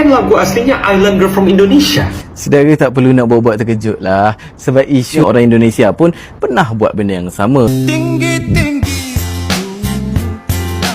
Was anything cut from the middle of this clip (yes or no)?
yes